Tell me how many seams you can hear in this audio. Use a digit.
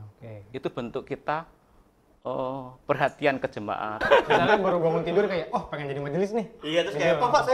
1